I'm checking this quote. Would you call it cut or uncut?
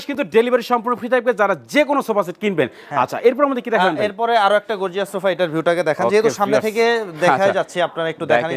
uncut